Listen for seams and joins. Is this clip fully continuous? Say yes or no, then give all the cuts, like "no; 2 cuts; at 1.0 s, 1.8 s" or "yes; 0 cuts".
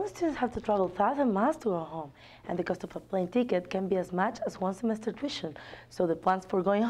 yes; 0 cuts